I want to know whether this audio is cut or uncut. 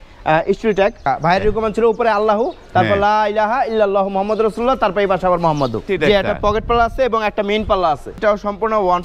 cut